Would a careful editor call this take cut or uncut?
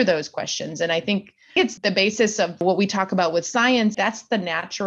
cut